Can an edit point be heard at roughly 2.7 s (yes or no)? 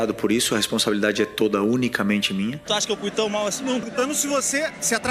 yes